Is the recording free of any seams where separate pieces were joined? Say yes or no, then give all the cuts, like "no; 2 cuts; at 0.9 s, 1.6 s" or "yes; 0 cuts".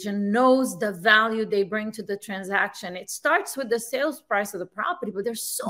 yes; 0 cuts